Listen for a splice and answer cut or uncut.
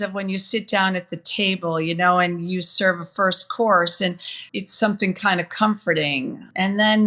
uncut